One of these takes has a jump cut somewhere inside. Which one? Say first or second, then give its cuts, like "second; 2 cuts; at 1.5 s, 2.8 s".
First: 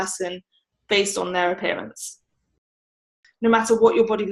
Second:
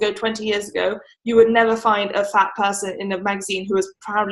first; 1 cut; at 3.0 s